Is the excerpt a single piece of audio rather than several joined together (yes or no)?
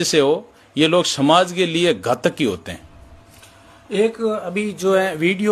yes